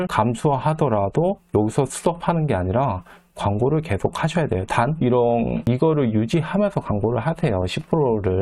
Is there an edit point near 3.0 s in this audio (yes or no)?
no